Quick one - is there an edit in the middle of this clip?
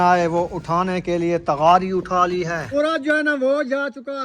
yes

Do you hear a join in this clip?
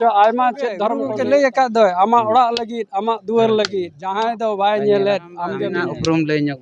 yes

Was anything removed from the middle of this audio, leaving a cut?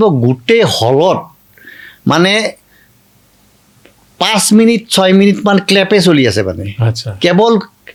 no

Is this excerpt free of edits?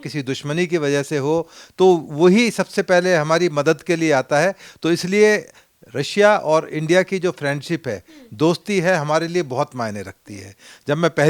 yes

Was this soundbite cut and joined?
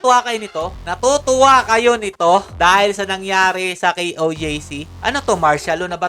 yes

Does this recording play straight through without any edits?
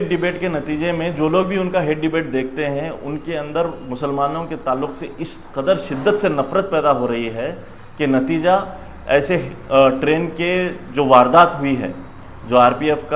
yes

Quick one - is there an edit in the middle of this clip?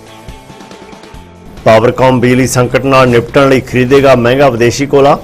no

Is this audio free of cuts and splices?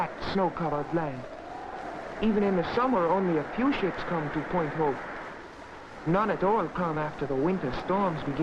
yes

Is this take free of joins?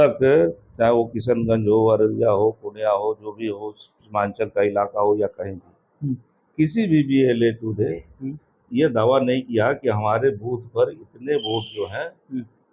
yes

